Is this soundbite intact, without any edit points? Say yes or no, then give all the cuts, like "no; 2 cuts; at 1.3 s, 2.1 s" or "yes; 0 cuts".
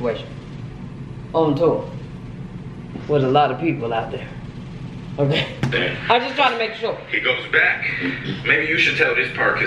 yes; 0 cuts